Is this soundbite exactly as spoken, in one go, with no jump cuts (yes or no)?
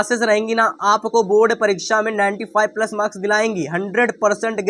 yes